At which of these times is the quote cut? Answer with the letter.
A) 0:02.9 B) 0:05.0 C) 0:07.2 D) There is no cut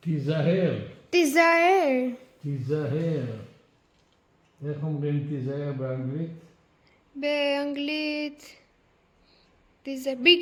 D